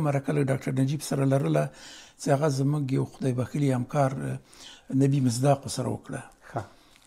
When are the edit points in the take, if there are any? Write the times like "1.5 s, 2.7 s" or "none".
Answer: none